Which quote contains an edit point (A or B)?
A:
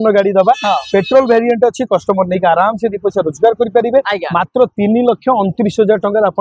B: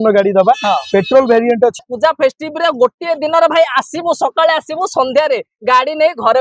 B